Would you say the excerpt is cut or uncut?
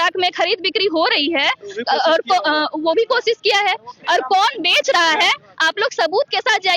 uncut